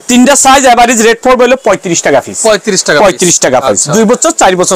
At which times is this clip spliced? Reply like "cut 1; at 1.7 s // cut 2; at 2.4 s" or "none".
none